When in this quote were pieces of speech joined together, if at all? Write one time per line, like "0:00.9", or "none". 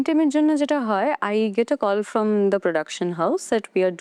none